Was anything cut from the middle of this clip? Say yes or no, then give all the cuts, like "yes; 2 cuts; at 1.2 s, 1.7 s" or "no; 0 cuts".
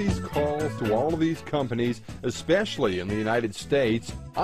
no; 0 cuts